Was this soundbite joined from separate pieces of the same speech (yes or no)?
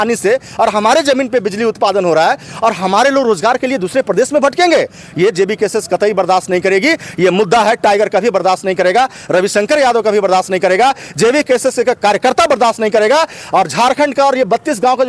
no